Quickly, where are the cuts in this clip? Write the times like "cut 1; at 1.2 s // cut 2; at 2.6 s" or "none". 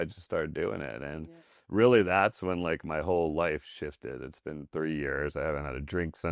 none